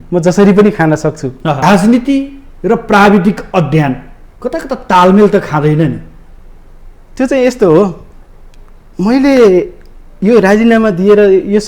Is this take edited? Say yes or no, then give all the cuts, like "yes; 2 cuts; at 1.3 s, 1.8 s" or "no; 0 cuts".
yes; 1 cut; at 1.6 s